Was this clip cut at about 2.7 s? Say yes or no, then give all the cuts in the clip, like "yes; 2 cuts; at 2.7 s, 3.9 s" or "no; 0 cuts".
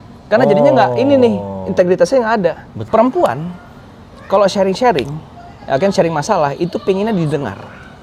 yes; 1 cut; at 2.7 s